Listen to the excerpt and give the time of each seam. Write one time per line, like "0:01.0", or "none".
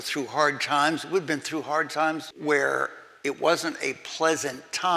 0:02.3